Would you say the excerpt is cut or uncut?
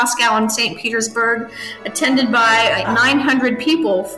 cut